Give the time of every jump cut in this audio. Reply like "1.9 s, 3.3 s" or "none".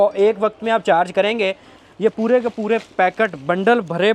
1.7 s